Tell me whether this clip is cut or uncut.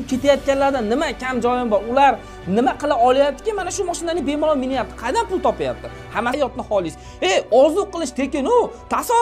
cut